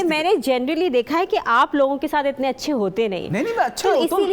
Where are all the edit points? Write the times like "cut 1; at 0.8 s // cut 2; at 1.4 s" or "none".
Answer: none